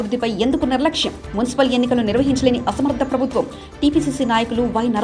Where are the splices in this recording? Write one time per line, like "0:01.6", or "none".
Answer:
none

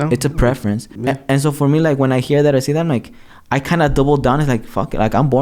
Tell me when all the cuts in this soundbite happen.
0:00.9

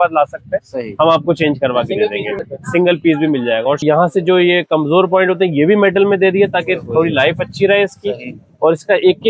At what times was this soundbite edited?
0:02.5
0:03.8

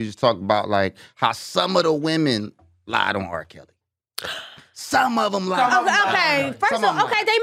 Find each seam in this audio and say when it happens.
none

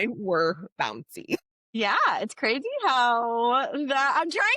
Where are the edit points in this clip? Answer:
0:01.6

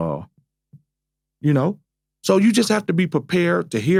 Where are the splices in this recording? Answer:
none

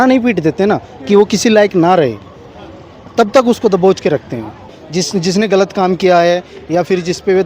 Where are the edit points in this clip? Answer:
0:04.8

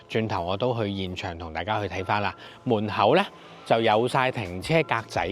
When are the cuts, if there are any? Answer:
0:02.5

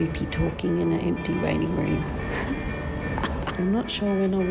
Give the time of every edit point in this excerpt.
0:03.5

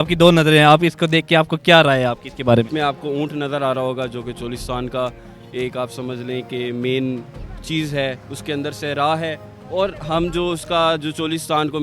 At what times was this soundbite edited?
0:02.7

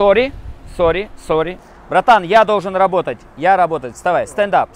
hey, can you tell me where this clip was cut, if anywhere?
0:01.6

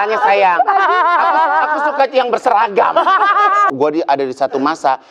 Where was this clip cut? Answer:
0:03.7

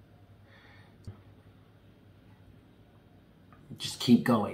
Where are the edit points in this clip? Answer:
0:01.1

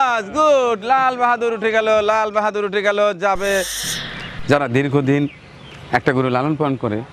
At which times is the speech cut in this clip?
0:03.9

